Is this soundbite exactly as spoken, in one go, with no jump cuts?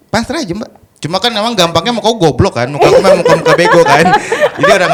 yes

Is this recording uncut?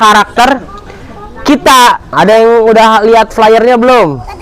no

